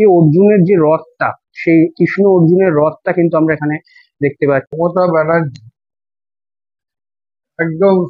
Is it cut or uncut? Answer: cut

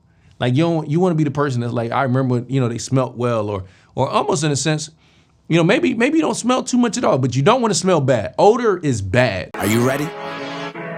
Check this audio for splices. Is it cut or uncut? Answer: cut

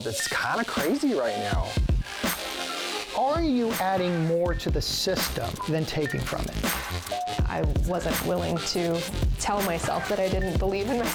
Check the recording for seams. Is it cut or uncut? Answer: uncut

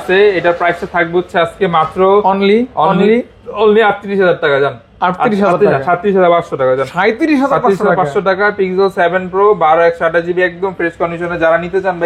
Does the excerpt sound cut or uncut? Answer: uncut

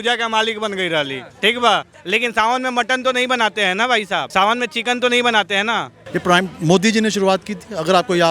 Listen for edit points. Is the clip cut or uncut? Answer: cut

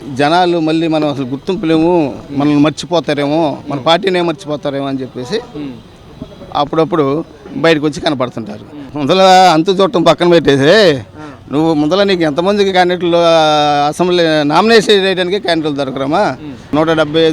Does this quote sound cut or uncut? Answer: cut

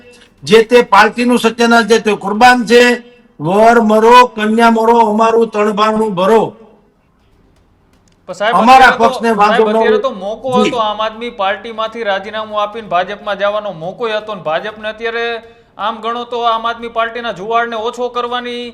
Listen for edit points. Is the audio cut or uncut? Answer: uncut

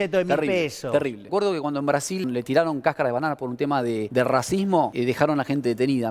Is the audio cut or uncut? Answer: cut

